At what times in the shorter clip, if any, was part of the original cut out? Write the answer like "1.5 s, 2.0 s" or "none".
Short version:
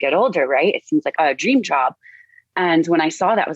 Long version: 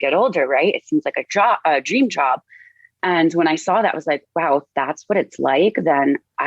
1.1 s